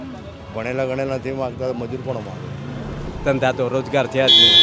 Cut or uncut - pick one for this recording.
cut